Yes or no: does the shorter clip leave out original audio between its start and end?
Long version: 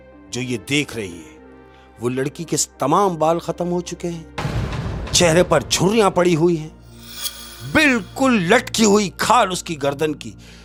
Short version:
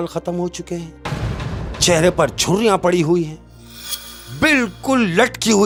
no